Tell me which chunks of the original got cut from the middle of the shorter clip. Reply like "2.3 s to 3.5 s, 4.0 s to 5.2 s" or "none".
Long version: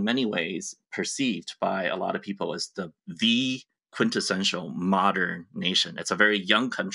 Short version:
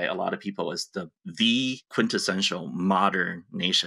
3.7 s to 3.9 s